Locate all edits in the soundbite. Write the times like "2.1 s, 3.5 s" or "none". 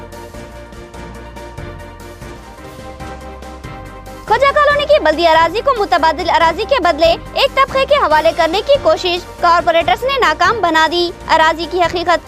3.1 s